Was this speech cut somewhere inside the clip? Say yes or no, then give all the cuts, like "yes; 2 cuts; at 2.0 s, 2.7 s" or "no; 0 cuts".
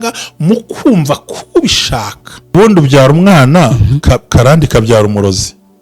yes; 1 cut; at 2.5 s